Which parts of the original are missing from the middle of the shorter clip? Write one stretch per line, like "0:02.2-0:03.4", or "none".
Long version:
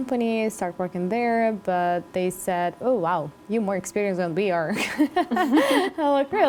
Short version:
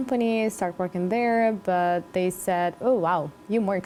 none